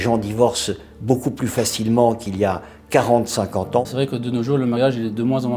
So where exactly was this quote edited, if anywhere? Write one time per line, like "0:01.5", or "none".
0:03.8